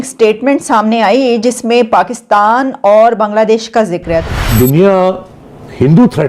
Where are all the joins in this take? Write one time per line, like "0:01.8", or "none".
0:04.3